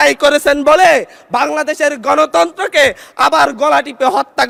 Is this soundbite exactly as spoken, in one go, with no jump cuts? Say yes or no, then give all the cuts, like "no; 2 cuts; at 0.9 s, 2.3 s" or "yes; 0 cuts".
yes; 0 cuts